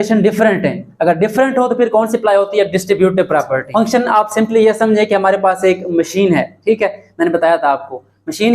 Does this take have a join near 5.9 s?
no; 1 cut; at 3.6 s

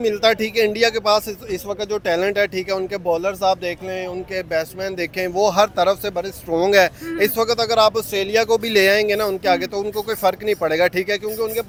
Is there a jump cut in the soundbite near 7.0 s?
no; 0 cuts

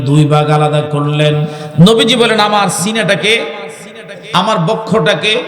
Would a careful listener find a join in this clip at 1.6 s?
yes; 1 cut; at 1.6 s

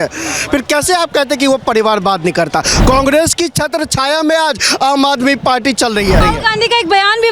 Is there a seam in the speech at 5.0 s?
no; 2 cuts; at 2.7 s, 6.2 s

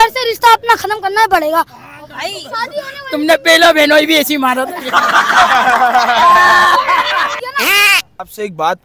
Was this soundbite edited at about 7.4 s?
yes; 1 cut; at 7.4 s

